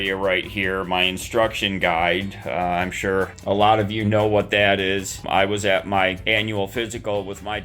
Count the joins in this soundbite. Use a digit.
3